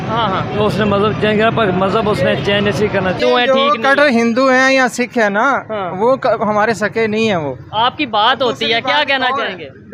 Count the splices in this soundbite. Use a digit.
1